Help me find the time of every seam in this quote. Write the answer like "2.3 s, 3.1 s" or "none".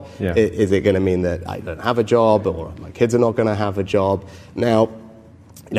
none